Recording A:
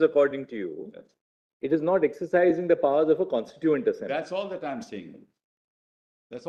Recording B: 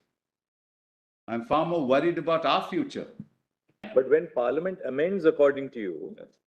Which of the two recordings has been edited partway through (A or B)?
B